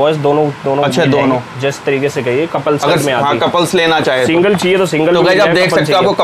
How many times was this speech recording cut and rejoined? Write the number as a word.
zero